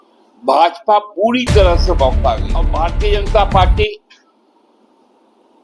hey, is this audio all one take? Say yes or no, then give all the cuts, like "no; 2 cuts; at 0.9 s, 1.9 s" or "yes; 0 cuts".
no; 1 cut; at 2.7 s